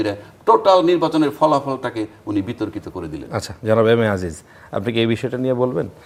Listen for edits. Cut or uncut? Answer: uncut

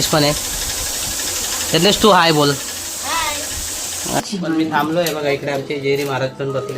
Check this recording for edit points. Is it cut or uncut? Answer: cut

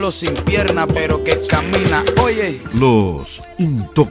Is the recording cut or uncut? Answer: uncut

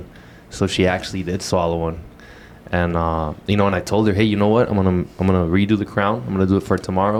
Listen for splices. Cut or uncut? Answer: uncut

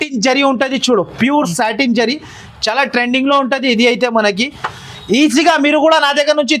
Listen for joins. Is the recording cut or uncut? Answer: uncut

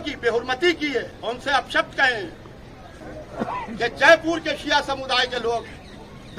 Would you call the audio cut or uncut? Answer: cut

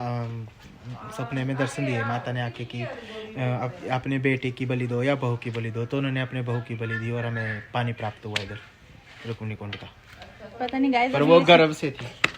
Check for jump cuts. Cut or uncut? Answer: uncut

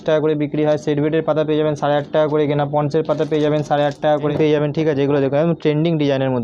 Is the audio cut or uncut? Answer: cut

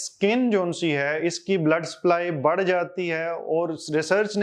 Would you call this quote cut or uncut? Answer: uncut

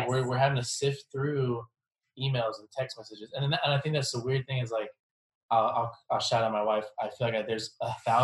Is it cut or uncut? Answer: cut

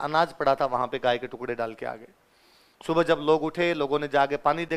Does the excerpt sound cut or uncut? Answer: uncut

